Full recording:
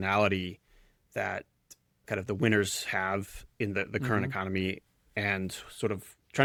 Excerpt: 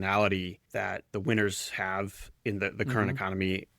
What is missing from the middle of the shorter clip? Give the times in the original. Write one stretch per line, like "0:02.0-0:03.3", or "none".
0:01.1-0:02.2

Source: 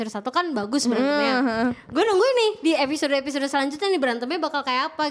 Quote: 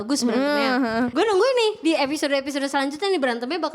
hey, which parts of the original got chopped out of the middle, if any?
0:01.7-0:01.9

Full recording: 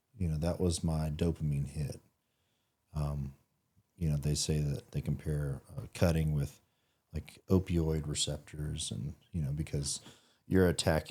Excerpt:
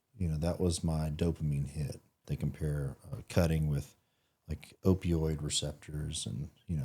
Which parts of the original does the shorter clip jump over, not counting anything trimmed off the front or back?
0:02.2-0:04.9

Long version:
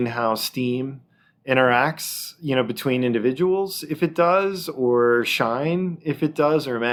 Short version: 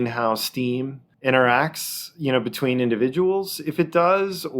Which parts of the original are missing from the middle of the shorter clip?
0:01.0-0:01.3

